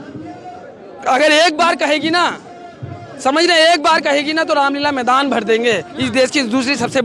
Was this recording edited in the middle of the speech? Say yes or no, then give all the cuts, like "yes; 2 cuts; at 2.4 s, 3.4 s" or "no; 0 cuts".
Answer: no; 0 cuts